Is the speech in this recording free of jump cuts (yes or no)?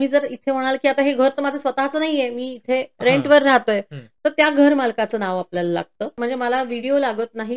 no